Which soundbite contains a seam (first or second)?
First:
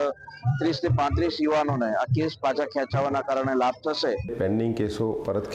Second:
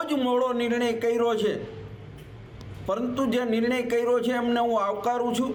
first